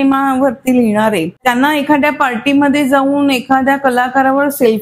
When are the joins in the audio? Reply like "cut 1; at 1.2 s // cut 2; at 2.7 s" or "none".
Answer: cut 1; at 1.3 s